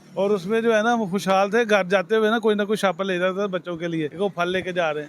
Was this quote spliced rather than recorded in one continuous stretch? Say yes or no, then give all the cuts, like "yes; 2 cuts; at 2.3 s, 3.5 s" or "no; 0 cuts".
yes; 1 cut; at 4.1 s